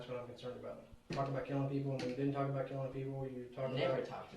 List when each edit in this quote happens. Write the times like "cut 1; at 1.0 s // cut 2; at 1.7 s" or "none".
cut 1; at 1.1 s